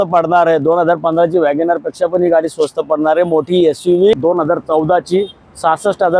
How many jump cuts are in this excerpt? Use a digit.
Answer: 1